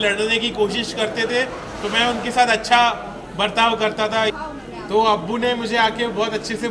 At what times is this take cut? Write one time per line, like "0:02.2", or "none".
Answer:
0:04.4